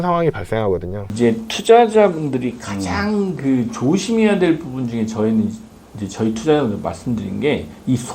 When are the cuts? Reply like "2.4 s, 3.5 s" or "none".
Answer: 1.1 s